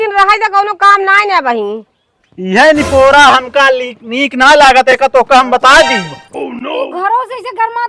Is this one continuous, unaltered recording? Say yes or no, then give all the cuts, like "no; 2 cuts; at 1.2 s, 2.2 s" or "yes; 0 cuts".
yes; 0 cuts